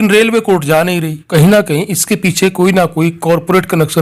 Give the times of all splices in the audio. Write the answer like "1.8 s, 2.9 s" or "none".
1.2 s